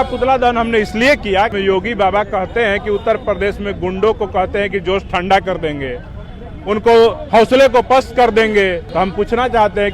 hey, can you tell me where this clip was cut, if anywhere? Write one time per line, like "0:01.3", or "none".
0:01.5
0:08.8